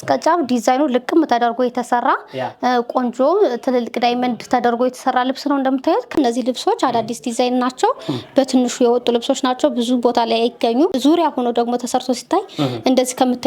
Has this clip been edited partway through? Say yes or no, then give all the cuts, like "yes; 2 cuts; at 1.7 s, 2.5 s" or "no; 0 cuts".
yes; 2 cuts; at 6.1 s, 10.9 s